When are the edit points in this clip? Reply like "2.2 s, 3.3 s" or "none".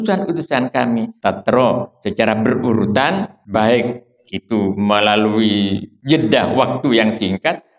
1.1 s, 3.4 s, 5.9 s